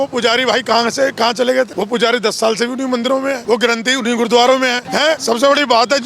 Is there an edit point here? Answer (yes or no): yes